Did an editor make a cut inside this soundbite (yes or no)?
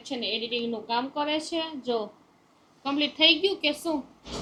no